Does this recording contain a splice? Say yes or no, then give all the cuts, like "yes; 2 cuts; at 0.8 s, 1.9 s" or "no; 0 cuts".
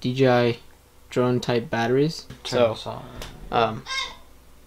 yes; 1 cut; at 2.4 s